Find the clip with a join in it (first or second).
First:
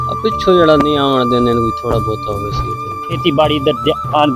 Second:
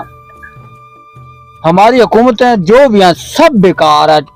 first